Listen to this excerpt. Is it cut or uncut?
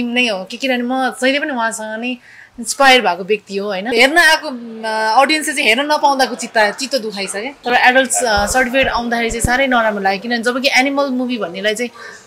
cut